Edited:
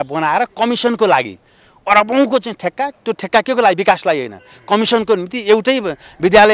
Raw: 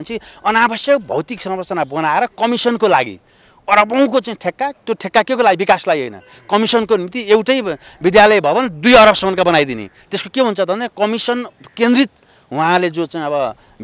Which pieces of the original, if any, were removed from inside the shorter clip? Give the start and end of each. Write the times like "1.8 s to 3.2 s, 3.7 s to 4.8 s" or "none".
none